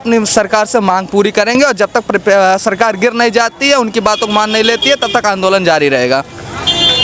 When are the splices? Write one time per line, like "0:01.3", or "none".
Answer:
none